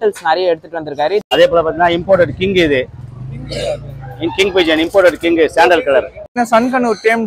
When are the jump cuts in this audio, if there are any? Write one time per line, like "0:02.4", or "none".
0:01.3
0:06.4